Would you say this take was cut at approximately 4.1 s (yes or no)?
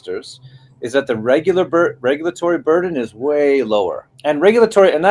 yes